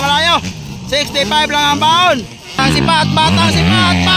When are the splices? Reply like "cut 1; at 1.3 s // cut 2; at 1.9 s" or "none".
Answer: cut 1; at 2.6 s